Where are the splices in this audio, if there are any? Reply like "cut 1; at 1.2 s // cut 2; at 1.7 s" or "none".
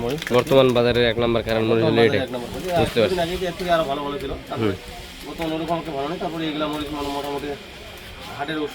none